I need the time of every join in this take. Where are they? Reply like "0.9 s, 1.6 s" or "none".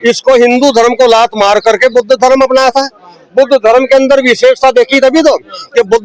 none